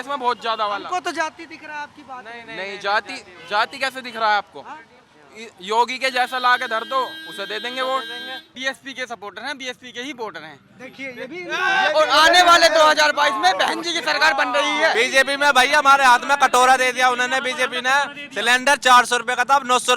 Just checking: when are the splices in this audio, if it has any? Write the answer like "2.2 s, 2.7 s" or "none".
8.5 s, 14.9 s